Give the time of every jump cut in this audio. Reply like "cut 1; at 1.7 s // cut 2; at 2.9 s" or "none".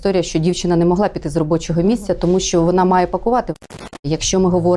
cut 1; at 3.8 s